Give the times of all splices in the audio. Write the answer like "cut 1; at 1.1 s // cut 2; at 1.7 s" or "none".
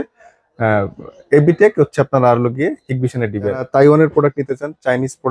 cut 1; at 3.7 s